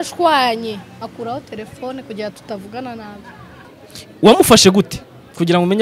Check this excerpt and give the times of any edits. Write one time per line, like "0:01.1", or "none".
0:03.7